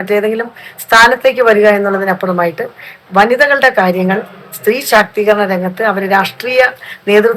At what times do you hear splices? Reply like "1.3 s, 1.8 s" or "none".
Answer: none